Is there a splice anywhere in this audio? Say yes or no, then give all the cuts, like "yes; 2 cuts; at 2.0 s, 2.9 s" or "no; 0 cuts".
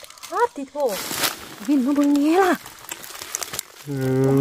yes; 1 cut; at 1.1 s